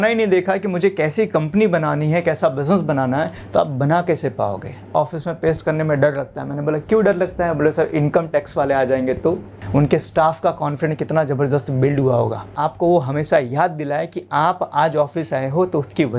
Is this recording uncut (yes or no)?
no